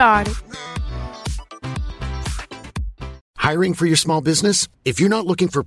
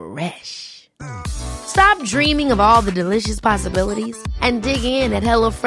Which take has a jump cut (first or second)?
first